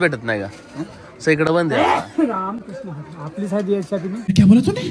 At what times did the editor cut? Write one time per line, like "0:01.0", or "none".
none